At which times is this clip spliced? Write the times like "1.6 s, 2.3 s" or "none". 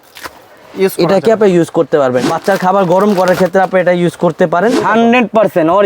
2.3 s, 4.9 s

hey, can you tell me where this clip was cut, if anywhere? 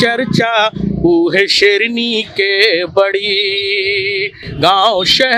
none

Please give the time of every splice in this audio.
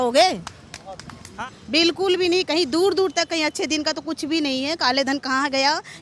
1.3 s

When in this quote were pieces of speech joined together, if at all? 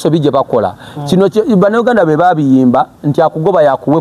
none

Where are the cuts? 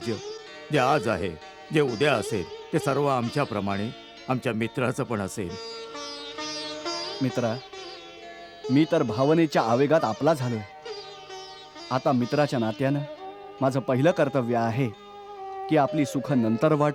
none

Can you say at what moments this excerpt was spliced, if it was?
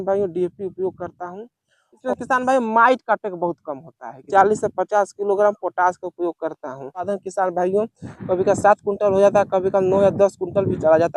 1.9 s, 4.3 s, 7.1 s

